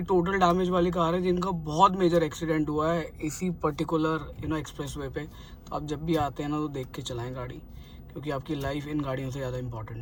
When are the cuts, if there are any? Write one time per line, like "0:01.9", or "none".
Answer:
none

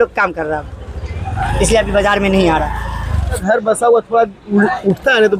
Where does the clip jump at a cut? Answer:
0:03.4

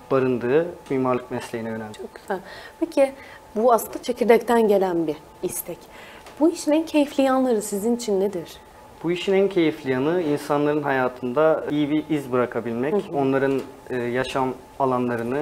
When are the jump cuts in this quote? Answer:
none

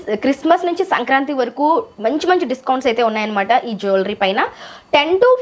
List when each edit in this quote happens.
none

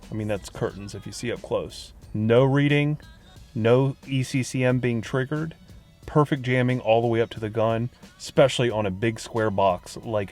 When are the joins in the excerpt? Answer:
0:02.0

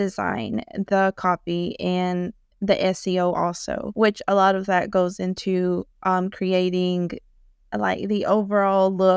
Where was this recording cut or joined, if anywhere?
0:03.8

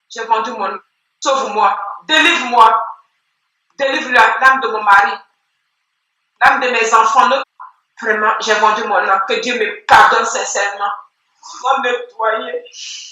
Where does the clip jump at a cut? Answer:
0:07.4
0:11.5

